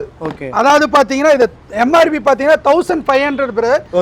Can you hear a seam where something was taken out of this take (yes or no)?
no